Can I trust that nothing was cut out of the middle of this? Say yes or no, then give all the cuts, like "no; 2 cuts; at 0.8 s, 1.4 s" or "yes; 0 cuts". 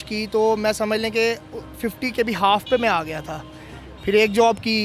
yes; 0 cuts